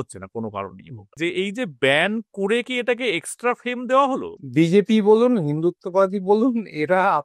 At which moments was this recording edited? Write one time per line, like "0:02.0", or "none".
0:01.2
0:04.4

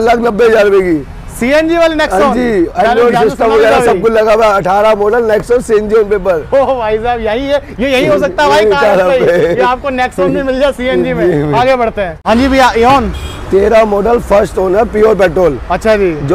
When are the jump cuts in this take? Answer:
none

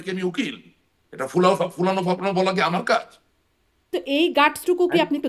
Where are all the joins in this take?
0:04.0

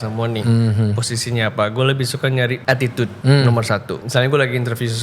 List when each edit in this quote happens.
0:02.8
0:04.0

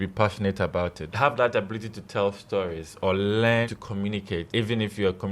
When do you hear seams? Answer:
0:01.1
0:03.8

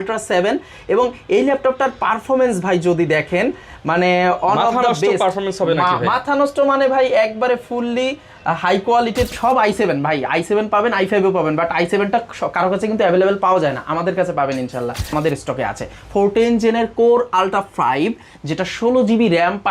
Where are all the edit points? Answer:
0:09.3
0:15.1

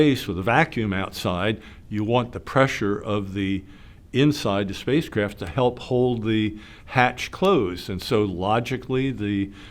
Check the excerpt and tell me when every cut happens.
none

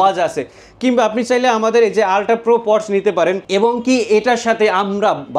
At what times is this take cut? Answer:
0:03.4

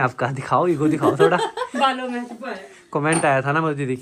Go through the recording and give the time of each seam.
none

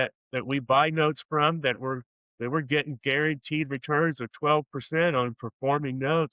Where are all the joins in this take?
none

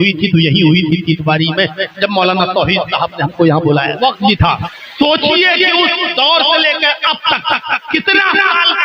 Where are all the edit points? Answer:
0:04.0
0:04.6

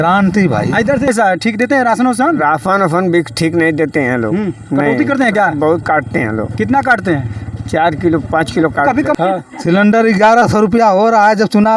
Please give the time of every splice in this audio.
0:01.1
0:09.2

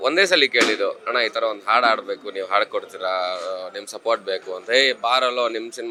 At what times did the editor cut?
none

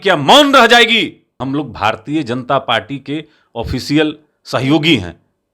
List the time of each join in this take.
0:01.4

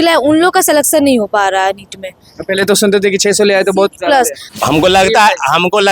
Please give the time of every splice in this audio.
0:04.4

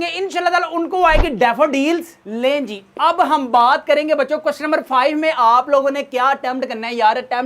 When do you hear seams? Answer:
none

